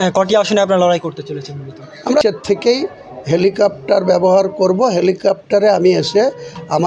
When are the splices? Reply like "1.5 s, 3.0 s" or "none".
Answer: 2.2 s